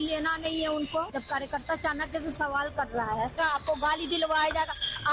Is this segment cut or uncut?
uncut